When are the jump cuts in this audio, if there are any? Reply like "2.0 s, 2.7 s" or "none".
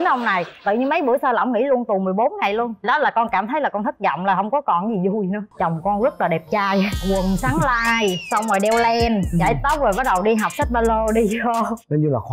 5.4 s

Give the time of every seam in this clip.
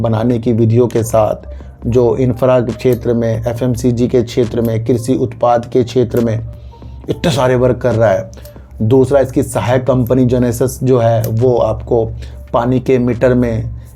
none

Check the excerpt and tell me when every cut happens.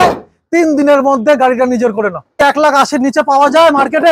2.4 s

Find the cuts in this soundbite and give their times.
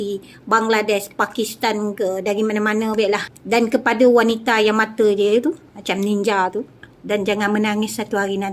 3.3 s, 6.9 s

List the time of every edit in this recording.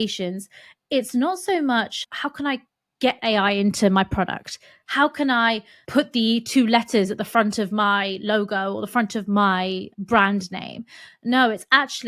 2.0 s, 5.7 s, 9.9 s

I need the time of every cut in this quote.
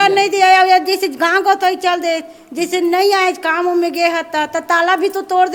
none

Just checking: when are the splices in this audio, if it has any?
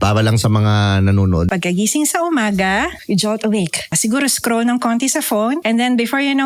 1.5 s, 3.0 s, 4.0 s, 5.6 s

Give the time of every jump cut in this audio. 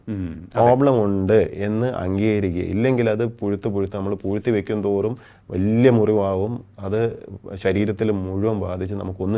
none

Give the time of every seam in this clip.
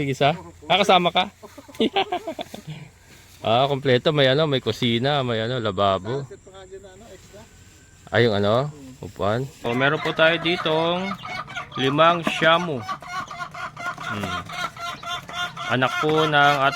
9.7 s

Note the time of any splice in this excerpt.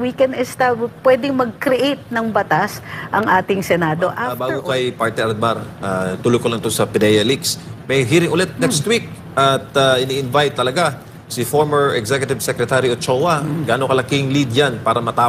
4.3 s

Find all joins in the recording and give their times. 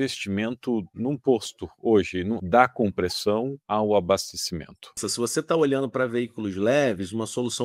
0.9 s, 2.4 s, 3.6 s, 5.0 s

